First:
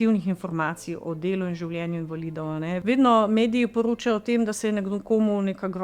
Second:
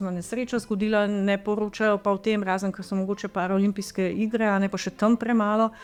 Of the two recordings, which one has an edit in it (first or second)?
first